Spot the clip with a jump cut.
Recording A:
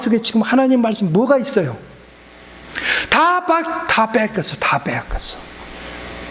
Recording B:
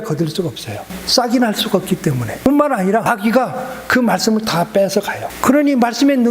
B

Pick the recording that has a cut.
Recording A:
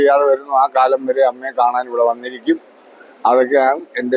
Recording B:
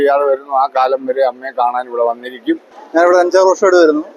B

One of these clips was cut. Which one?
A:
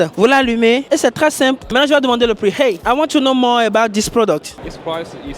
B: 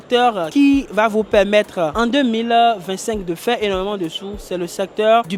A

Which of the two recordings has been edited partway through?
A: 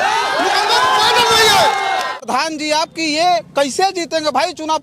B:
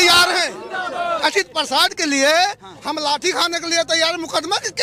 A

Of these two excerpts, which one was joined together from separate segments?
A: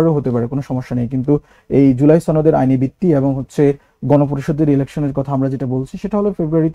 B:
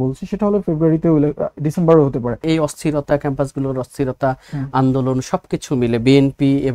B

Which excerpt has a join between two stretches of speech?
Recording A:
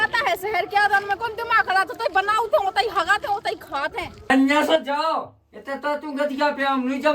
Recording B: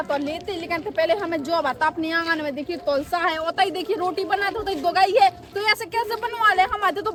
A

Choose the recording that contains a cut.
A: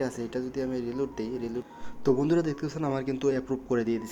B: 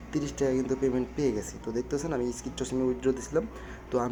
A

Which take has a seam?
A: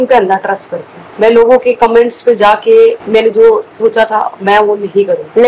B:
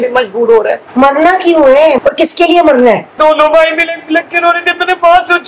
B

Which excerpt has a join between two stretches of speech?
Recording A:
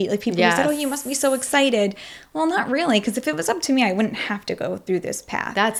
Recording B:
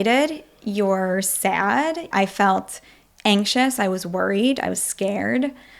B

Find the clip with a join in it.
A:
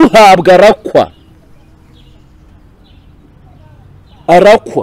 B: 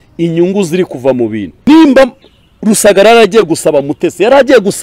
B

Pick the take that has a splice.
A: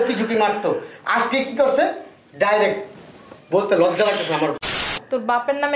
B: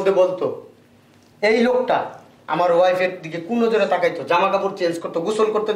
A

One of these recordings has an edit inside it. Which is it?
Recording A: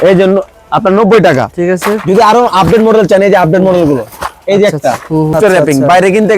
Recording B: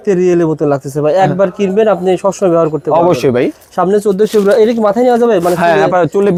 A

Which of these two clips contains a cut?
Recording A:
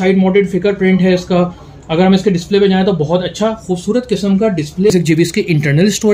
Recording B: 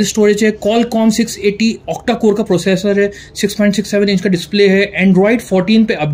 A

